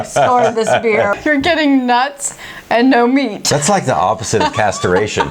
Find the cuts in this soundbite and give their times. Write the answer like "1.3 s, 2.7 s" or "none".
1.2 s, 3.4 s